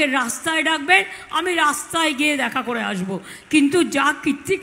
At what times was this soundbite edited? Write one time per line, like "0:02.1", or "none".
none